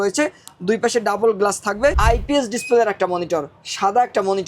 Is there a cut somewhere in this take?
yes; 1 cut; at 1.9 s

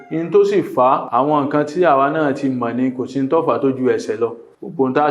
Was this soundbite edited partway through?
yes; 1 cut; at 1.0 s

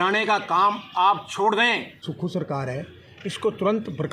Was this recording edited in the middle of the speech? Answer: yes; 1 cut; at 2.1 s

